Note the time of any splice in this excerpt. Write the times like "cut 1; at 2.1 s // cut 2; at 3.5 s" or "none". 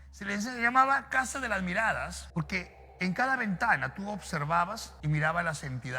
cut 1; at 2.2 s // cut 2; at 4.9 s